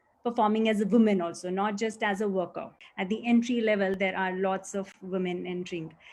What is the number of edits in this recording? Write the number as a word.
one